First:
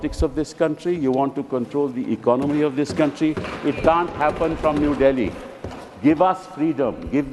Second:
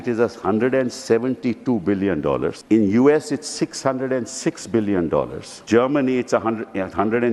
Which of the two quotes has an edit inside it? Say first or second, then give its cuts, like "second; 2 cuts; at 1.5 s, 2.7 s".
second; 2 cuts; at 2.6 s, 5.5 s